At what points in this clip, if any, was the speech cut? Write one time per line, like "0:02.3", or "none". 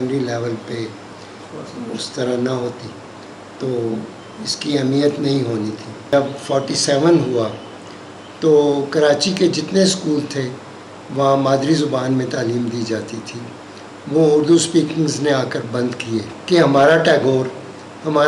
0:06.1
0:16.3